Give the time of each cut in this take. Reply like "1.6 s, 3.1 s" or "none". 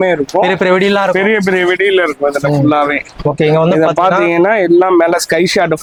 none